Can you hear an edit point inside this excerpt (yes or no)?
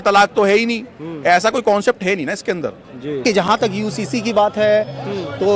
yes